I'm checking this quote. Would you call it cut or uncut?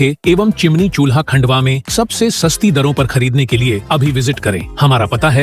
uncut